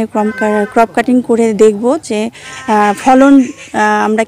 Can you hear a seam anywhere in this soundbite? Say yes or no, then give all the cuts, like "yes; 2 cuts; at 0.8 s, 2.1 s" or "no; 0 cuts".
no; 0 cuts